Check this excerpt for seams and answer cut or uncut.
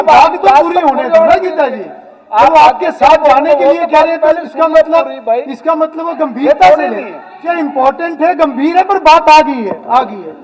cut